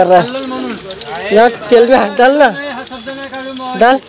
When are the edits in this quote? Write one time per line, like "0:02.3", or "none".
none